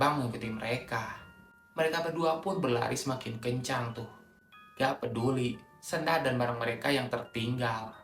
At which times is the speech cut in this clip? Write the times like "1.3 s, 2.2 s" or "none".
none

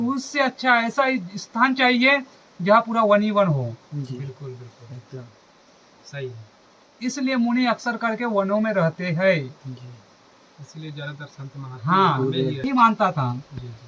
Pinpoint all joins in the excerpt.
12.6 s

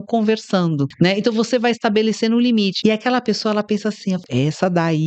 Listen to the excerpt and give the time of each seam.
0.9 s, 2.7 s, 4.2 s

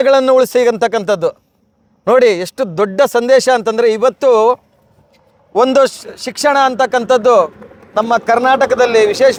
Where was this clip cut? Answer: none

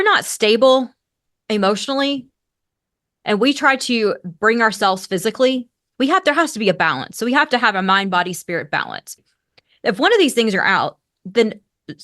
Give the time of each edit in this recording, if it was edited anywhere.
9.3 s

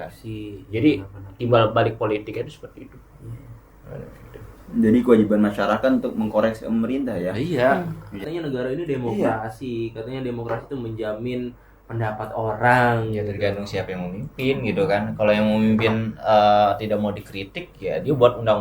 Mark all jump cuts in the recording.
8.3 s

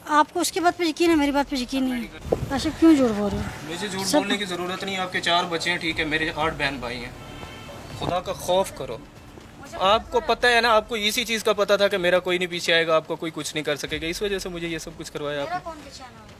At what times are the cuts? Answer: 2.1 s

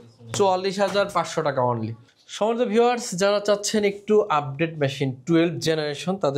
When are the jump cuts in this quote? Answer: 2.0 s

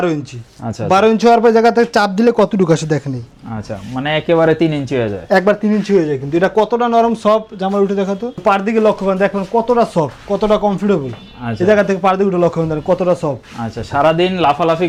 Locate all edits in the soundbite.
none

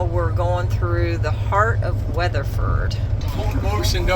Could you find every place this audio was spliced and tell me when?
3.2 s

